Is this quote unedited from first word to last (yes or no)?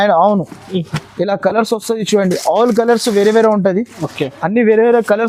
yes